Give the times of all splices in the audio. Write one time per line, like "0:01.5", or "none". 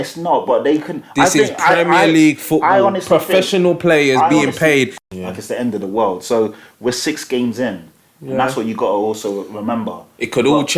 0:04.9